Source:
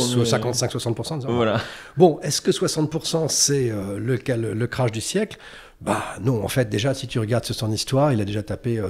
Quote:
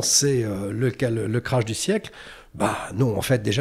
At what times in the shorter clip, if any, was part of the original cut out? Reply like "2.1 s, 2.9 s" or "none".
none